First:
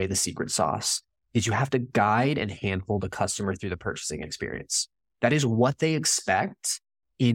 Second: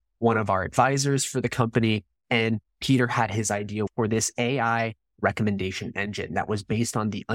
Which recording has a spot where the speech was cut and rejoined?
second; 1 cut; at 3.9 s

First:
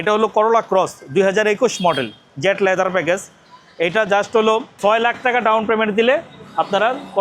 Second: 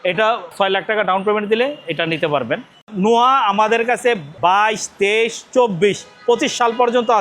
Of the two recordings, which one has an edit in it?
second; 2 cuts; at 2.8 s, 4.3 s

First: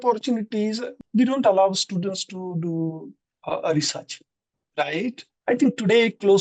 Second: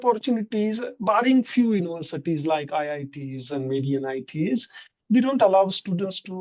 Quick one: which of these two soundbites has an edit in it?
first; 2 cuts; at 0.9 s, 5.3 s

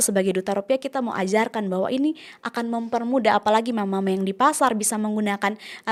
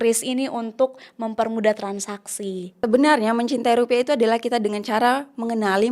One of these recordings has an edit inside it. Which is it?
second; 1 cut; at 2.8 s

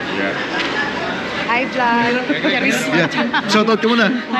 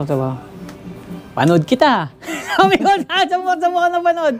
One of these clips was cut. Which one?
first; 1 cut; at 1.4 s

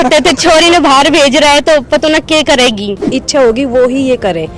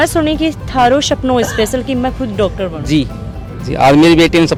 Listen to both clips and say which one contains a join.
first; 1 cut; at 3.0 s

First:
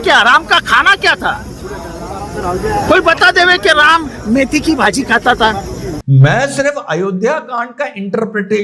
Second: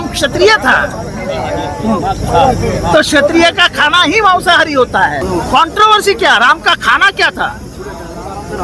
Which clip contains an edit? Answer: first; 1 cut; at 5.8 s

